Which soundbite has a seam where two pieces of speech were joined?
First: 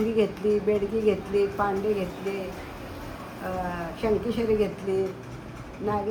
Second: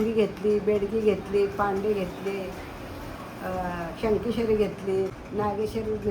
second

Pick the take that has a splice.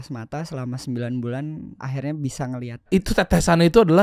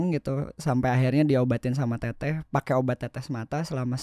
first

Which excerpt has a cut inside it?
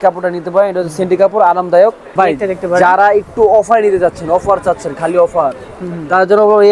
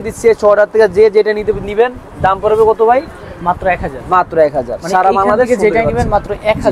first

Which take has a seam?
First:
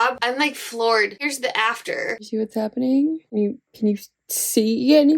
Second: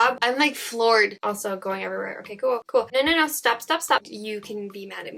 second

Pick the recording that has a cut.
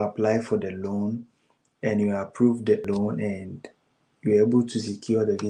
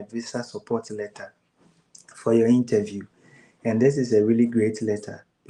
first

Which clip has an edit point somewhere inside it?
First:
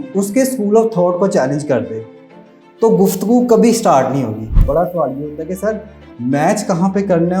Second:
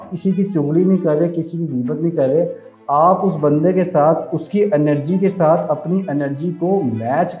first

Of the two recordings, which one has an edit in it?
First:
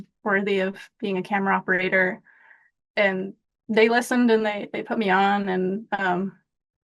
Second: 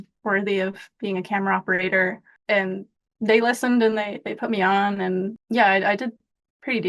second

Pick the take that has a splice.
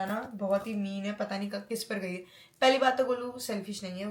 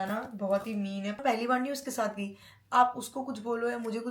second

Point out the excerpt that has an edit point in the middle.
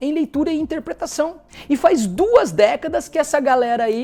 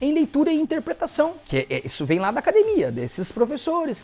second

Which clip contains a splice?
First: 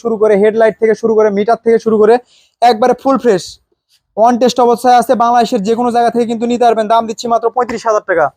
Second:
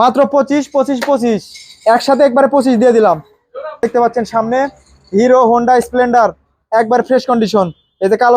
second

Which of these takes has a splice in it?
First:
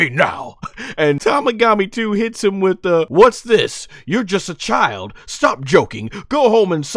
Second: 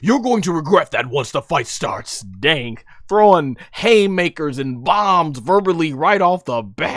first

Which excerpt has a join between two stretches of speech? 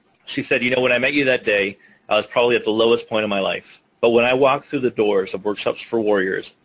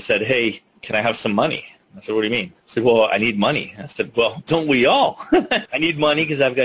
second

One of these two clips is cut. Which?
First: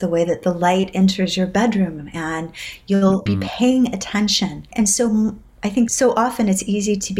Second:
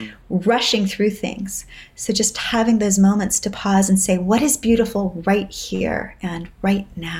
first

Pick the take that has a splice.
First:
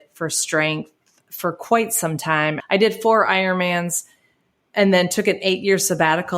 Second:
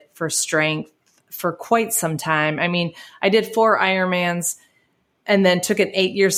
first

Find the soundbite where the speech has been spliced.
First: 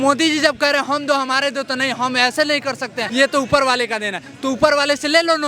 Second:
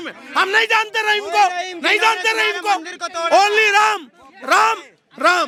first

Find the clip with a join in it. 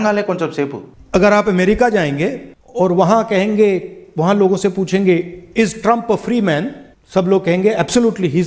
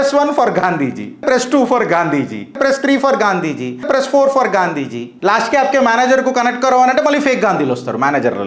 second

